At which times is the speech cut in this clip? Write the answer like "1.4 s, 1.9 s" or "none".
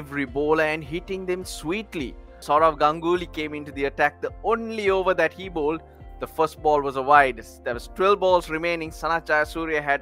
2.4 s